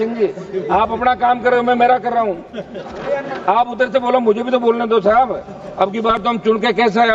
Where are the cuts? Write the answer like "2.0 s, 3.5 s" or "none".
none